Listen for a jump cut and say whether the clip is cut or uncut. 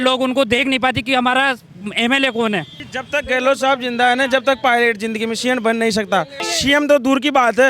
cut